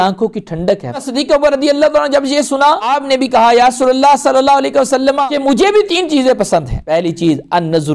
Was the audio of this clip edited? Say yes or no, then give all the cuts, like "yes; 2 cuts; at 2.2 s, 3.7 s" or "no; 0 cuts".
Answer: yes; 4 cuts; at 1.0 s, 2.9 s, 5.3 s, 6.8 s